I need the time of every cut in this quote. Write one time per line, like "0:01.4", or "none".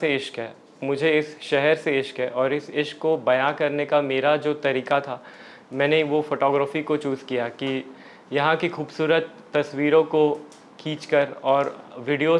none